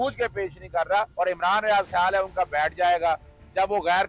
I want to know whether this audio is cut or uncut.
cut